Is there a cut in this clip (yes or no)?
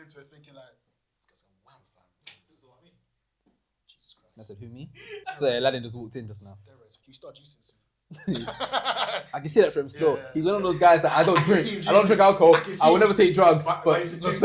yes